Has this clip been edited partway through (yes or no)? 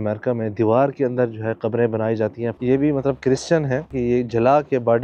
yes